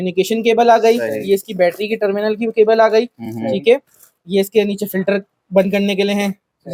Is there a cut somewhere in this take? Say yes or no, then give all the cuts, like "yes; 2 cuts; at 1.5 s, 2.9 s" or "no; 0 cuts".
no; 0 cuts